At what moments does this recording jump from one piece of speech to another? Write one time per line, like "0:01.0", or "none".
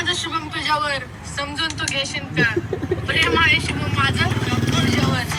none